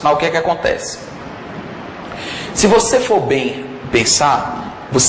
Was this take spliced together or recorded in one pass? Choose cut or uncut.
uncut